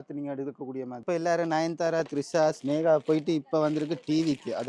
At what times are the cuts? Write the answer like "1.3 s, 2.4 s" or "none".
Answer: 1.0 s